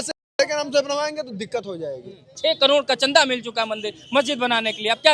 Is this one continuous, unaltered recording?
no; 1 cut; at 2.3 s

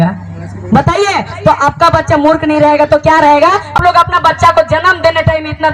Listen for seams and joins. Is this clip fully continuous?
no; 1 cut; at 3.8 s

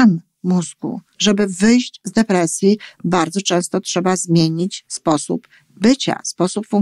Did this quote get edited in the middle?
yes; 1 cut; at 1.2 s

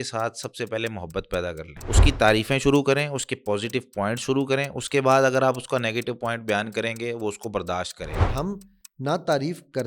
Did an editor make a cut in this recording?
yes; 2 cuts; at 1.7 s, 8.3 s

